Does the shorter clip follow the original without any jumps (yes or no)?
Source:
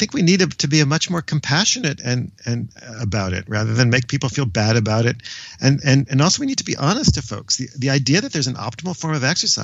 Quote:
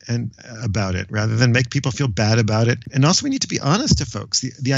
no